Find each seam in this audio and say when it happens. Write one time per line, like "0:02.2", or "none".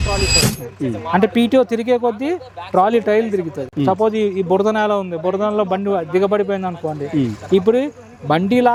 none